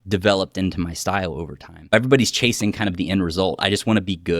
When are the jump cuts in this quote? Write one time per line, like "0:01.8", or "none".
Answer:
0:01.9